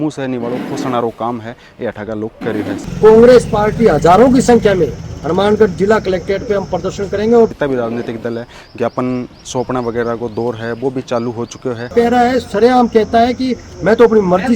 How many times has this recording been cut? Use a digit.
3